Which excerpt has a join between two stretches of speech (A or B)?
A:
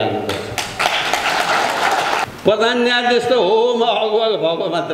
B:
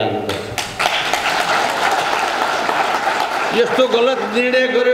A